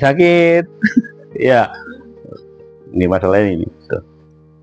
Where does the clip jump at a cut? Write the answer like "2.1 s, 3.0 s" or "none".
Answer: none